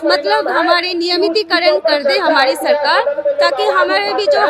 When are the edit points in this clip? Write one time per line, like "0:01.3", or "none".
none